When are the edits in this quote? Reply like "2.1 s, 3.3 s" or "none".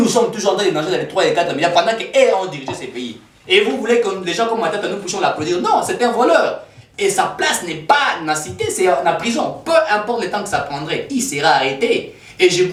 none